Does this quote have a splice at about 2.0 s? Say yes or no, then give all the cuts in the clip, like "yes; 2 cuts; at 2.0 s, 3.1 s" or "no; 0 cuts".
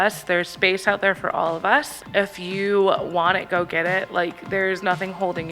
yes; 1 cut; at 2.0 s